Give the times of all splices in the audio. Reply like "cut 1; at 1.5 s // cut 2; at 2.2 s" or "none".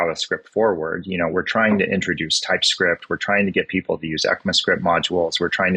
none